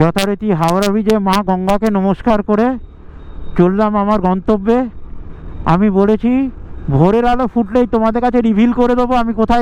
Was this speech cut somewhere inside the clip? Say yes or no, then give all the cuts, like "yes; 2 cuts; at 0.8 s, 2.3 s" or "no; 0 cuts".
no; 0 cuts